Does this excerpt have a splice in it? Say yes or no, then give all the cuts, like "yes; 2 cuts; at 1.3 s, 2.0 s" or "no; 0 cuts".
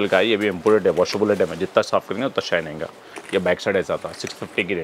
no; 0 cuts